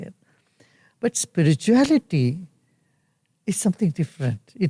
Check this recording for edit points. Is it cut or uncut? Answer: uncut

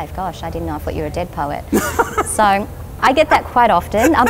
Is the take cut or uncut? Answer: cut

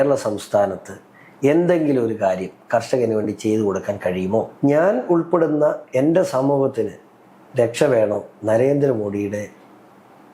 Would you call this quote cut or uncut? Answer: cut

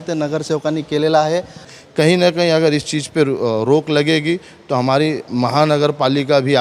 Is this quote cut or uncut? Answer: cut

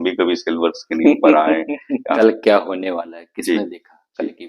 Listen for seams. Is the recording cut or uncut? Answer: cut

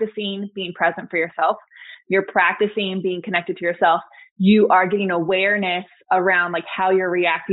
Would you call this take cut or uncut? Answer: uncut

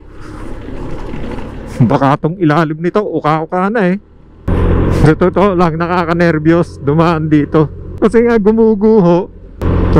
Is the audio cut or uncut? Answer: cut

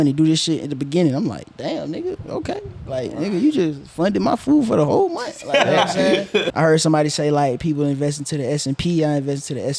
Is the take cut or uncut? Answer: cut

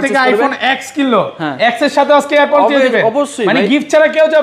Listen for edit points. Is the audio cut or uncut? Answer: uncut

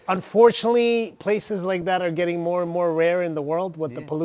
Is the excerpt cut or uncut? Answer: uncut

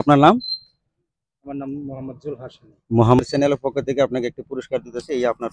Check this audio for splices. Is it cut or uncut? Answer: cut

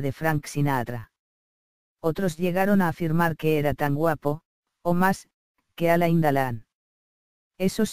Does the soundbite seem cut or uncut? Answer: cut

